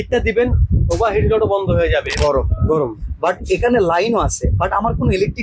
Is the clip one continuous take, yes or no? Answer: no